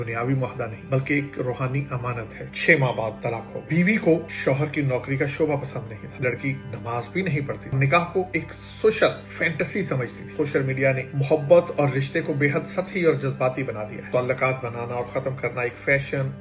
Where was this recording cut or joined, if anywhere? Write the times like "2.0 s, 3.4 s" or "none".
2.5 s, 3.6 s, 6.2 s, 7.7 s, 10.3 s, 14.1 s